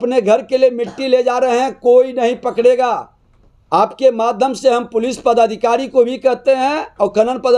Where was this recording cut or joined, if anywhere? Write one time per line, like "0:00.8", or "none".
none